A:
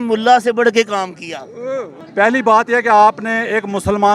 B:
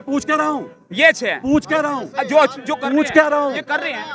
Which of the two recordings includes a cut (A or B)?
A